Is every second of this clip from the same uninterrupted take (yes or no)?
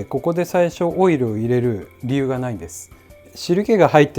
no